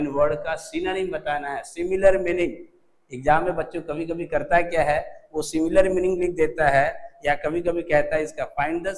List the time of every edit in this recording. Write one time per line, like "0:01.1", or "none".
none